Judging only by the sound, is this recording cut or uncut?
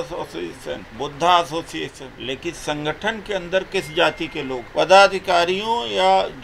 cut